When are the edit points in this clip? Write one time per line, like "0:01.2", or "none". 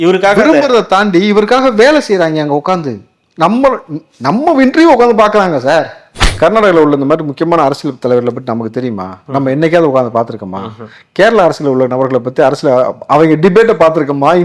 0:06.2